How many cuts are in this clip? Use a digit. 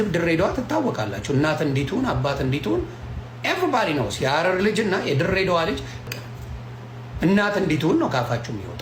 0